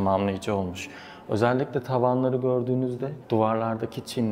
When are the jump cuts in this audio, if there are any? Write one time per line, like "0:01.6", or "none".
none